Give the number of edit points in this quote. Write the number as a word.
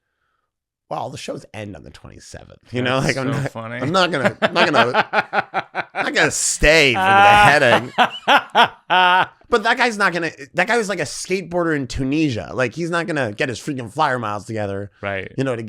one